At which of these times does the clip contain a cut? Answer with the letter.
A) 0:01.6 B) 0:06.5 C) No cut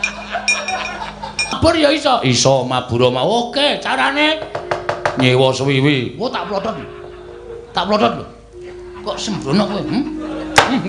A